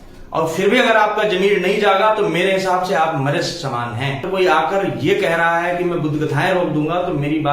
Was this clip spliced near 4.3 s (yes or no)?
yes